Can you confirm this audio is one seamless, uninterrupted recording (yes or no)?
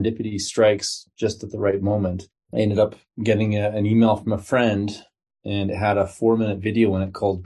yes